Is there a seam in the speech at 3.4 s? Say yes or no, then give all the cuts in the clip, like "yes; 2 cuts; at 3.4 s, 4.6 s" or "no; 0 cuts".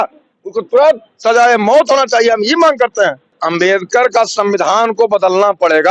yes; 1 cut; at 3.4 s